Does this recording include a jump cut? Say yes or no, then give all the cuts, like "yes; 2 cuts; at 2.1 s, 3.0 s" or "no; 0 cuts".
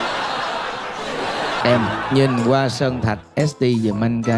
yes; 1 cut; at 1.6 s